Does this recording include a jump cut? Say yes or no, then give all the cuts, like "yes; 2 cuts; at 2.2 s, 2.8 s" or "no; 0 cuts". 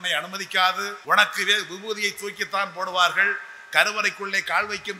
yes; 1 cut; at 0.9 s